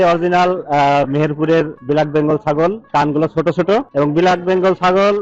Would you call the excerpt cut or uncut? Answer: cut